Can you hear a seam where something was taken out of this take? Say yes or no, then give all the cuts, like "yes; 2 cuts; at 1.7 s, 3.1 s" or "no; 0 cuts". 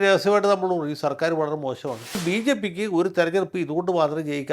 yes; 1 cut; at 2.2 s